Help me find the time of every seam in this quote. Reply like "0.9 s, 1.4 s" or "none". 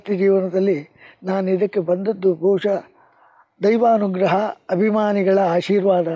none